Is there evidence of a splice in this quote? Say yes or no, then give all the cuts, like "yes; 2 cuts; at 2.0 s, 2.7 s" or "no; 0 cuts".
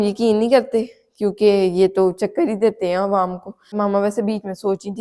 yes; 1 cut; at 3.8 s